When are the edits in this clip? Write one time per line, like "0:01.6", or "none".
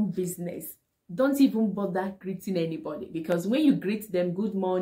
none